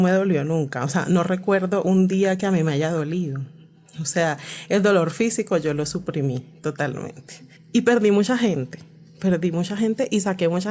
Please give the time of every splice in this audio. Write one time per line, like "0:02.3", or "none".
0:07.5